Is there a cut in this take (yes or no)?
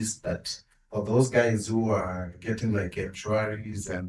no